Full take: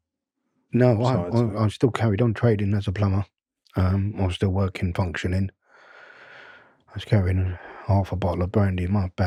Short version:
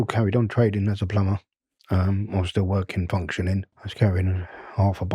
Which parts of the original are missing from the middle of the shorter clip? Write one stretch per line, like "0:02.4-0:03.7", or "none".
0:05.7-0:06.9